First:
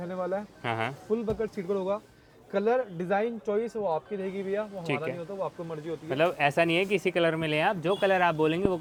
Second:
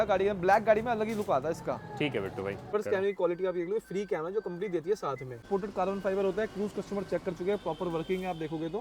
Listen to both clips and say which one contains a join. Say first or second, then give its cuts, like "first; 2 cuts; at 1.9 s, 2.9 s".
second; 2 cuts; at 2.7 s, 5.4 s